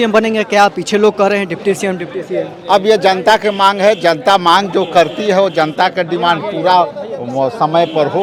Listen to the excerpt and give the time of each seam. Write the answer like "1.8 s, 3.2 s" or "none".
none